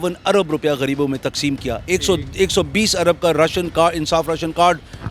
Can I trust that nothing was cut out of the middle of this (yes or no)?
yes